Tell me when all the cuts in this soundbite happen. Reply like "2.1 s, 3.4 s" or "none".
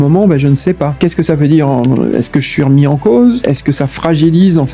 0.9 s, 3.5 s